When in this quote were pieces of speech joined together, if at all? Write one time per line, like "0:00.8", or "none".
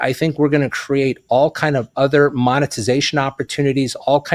none